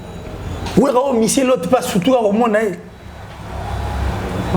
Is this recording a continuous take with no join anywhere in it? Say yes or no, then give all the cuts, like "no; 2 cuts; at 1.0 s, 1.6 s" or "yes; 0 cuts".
yes; 0 cuts